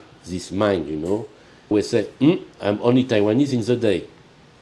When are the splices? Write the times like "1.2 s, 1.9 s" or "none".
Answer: 1.7 s